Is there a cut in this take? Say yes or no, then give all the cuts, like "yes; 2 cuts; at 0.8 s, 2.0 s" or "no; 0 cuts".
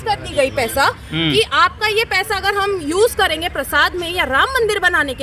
no; 0 cuts